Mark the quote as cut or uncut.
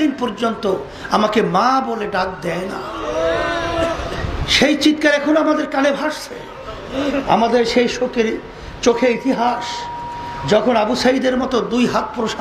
uncut